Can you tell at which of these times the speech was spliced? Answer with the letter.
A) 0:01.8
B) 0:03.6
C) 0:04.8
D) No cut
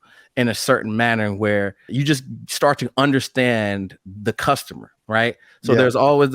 A